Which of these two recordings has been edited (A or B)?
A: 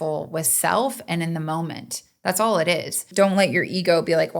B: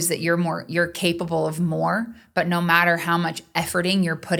A